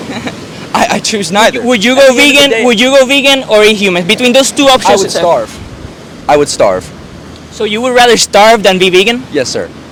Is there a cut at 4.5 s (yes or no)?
no